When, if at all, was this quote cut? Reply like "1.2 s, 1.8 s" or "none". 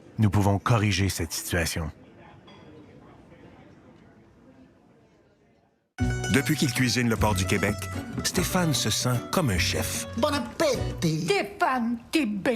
5.8 s

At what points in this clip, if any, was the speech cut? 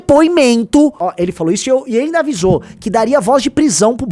1.0 s

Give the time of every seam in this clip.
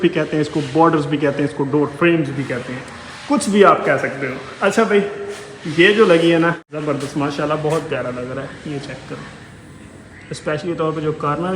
6.6 s

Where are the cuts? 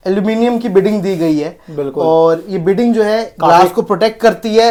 none

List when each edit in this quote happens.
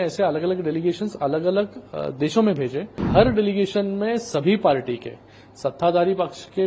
2.9 s

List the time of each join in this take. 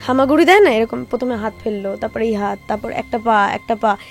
none

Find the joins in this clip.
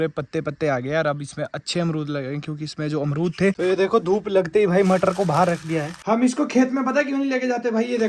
3.5 s, 5.9 s

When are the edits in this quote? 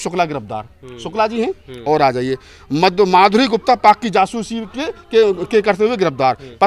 none

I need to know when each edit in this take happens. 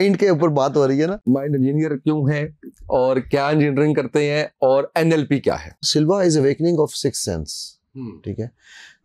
1.2 s, 5.9 s

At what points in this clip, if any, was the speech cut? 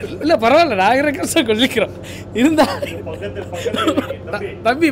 none

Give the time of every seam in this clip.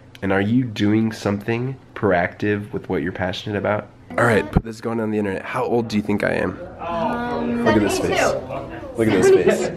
1.8 s, 4.1 s

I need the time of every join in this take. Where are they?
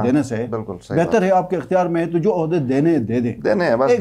none

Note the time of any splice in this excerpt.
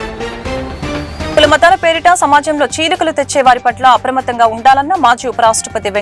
1.3 s

